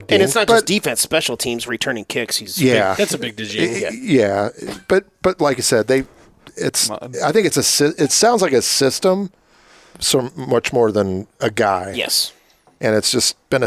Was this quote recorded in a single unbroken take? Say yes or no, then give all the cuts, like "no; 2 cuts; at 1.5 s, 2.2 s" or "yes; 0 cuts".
yes; 0 cuts